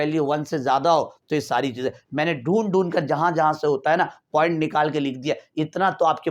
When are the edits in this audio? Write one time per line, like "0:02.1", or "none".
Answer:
none